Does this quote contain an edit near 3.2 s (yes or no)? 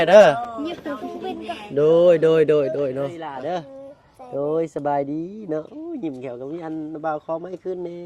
yes